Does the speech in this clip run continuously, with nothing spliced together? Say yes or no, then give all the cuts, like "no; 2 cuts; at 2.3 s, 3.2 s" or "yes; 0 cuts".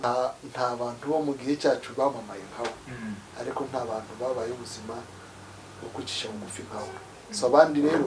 no; 1 cut; at 3.3 s